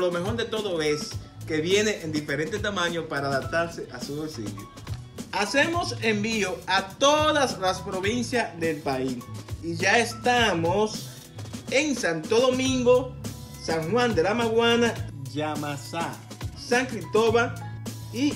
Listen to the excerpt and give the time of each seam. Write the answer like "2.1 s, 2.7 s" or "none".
none